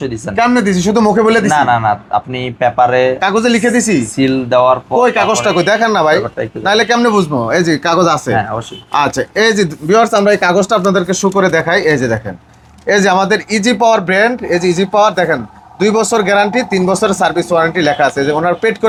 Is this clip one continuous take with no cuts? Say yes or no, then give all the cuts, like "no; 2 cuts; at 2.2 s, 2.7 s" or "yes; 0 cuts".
yes; 0 cuts